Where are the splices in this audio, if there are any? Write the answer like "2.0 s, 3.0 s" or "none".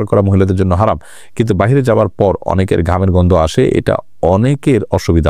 none